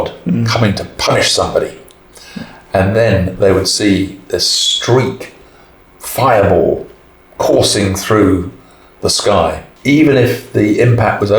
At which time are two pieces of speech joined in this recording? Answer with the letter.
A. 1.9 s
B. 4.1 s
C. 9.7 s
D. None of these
C